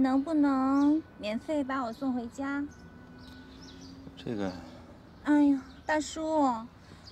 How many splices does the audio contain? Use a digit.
1